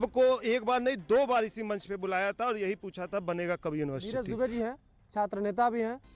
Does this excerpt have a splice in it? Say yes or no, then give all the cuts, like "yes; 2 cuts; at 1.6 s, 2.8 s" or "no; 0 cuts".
yes; 1 cut; at 4.0 s